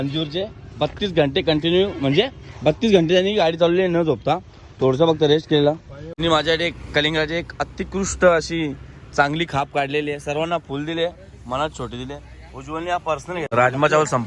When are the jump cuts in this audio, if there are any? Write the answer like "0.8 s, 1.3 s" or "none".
6.2 s, 13.5 s